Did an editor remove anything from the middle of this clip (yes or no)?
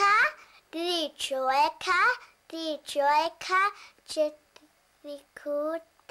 no